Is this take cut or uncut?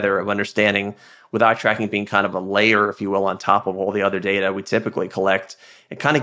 uncut